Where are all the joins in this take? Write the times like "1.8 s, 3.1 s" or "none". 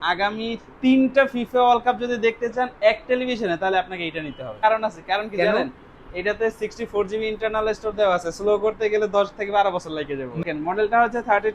4.6 s, 10.4 s